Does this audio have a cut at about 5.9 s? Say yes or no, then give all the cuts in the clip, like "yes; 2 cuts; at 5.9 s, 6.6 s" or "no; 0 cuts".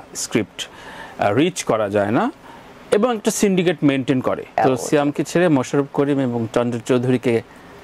no; 1 cut; at 4.6 s